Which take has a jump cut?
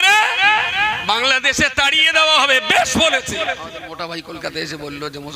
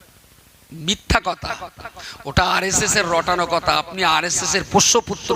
first; 1 cut; at 3.8 s

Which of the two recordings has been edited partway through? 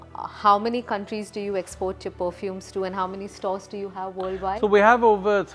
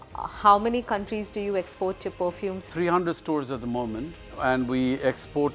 second; 1 cut; at 2.7 s

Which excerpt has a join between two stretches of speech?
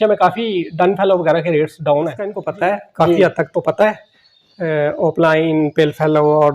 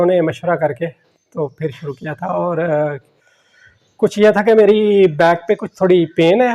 first; 1 cut; at 2.4 s

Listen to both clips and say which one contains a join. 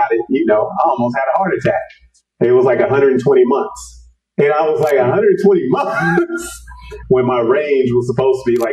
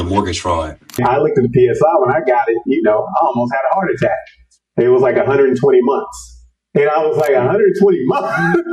second; 1 cut; at 1.0 s

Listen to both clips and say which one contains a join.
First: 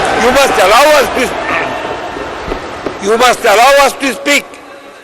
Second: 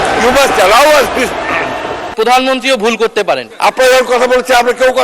second; 2 cuts; at 2.1 s, 3.5 s

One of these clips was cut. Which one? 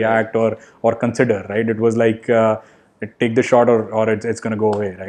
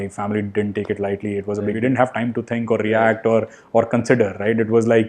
second; 1 cut; at 1.8 s

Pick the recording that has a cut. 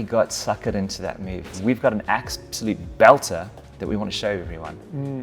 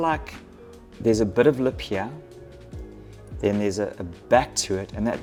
first; 1 cut; at 1.4 s

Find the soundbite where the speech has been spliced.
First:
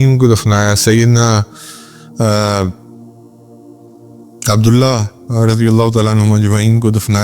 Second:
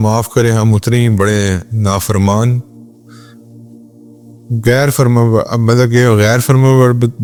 first; 2 cuts; at 3.0 s, 4.4 s

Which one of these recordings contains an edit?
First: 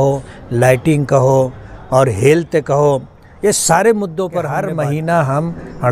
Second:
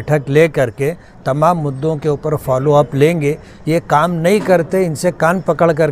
first; 1 cut; at 4.7 s

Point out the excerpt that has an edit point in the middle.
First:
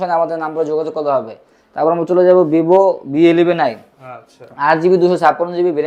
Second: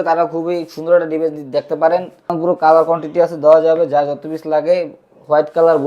second; 1 cut; at 2.3 s

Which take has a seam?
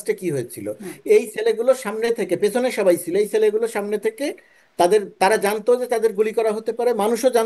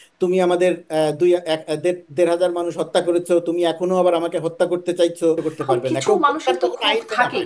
second; 1 cut; at 5.4 s

